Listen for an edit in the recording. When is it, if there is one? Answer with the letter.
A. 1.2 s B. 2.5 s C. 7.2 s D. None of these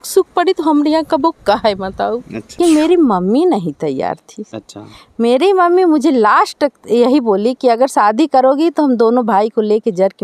B